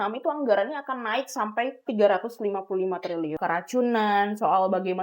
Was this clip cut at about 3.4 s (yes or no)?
yes